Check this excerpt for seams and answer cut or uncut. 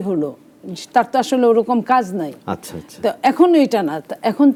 uncut